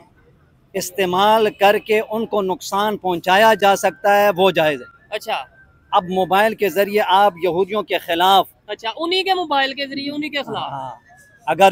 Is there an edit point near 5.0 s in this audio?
no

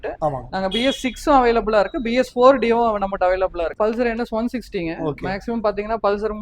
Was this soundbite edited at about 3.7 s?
yes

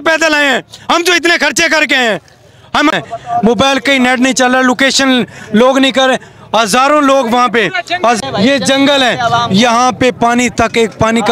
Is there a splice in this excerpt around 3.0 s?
yes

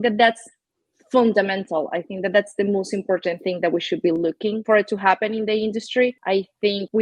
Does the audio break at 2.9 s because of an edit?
no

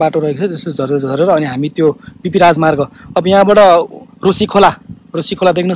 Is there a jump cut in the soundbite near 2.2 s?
no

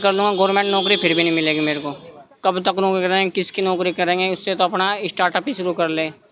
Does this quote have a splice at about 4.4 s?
no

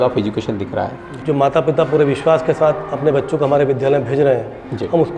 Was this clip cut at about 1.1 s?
yes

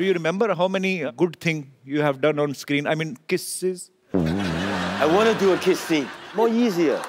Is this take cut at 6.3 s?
yes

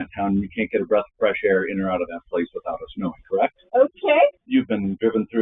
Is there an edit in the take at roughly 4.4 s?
yes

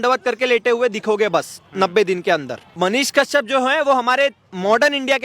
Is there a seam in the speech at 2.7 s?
yes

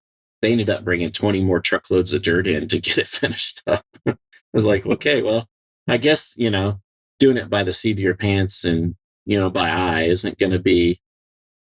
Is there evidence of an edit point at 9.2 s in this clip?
yes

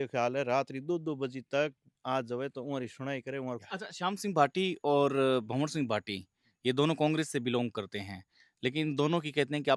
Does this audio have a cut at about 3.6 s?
yes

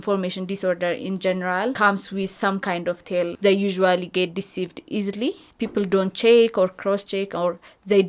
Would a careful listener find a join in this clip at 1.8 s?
yes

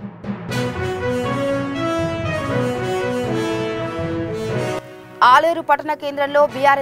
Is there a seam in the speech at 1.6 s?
no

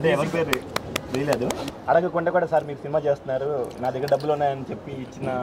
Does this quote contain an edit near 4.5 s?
no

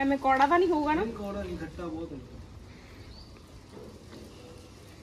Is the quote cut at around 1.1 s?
no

